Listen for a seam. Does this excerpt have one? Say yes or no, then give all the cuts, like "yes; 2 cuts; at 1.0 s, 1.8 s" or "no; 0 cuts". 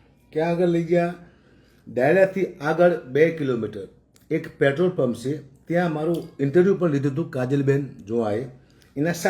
no; 0 cuts